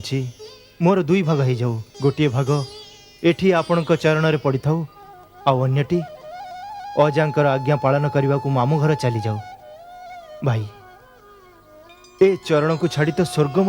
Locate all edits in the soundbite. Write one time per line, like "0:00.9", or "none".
0:01.9